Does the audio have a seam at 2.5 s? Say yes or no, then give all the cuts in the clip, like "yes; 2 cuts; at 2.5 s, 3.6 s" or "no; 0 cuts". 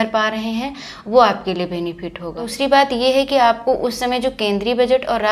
yes; 1 cut; at 2.5 s